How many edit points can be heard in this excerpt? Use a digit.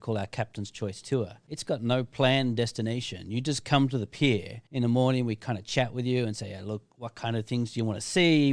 2